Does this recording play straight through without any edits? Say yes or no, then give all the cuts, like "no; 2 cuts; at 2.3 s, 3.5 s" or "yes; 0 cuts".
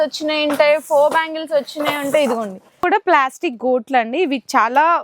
no; 1 cut; at 2.8 s